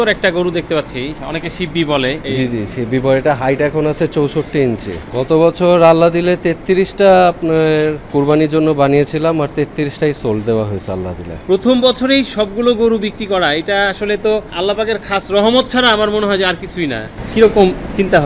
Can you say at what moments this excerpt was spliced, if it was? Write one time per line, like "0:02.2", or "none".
0:01.2
0:02.2
0:05.0
0:08.1
0:11.4
0:17.1